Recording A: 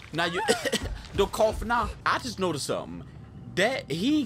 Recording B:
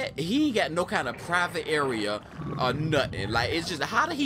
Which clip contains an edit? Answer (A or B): A